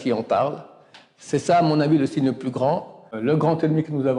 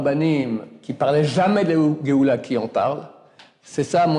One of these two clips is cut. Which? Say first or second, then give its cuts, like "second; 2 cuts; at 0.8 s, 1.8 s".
first; 1 cut; at 3.1 s